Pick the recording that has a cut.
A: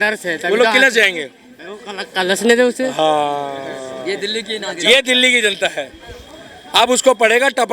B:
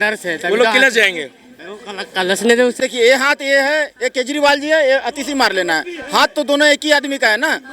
B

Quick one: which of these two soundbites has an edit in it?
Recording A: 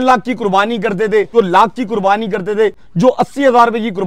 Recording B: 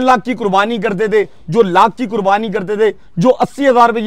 A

